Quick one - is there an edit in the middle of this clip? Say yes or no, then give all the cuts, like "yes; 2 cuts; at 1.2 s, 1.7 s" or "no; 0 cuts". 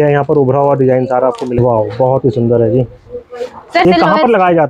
yes; 2 cuts; at 1.6 s, 3.8 s